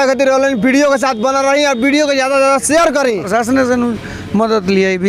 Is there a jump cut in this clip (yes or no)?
yes